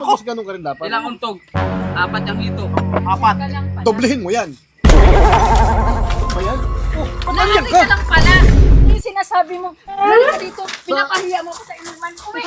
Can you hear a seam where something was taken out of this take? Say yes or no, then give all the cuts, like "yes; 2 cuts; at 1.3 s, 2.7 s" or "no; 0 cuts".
yes; 1 cut; at 9.0 s